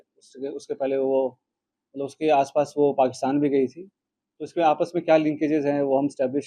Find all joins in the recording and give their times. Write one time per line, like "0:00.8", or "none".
none